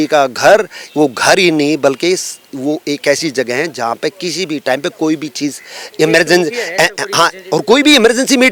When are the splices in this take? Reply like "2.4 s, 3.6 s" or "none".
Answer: none